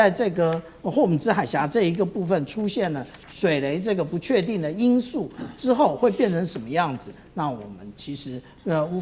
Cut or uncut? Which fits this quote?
uncut